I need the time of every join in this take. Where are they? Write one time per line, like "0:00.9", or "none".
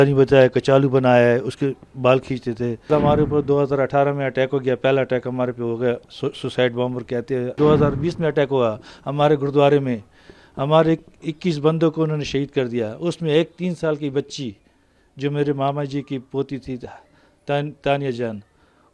0:02.9
0:07.6